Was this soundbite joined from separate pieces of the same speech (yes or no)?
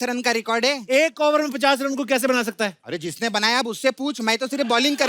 yes